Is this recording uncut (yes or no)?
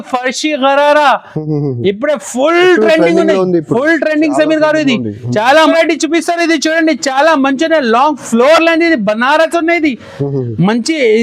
no